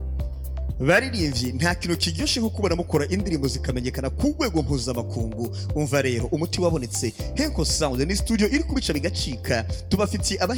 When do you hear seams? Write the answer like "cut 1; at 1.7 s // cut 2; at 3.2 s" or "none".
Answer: none